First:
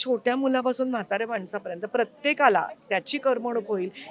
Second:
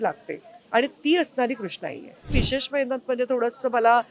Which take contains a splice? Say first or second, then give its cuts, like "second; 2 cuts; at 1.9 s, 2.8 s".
second; 1 cut; at 2.3 s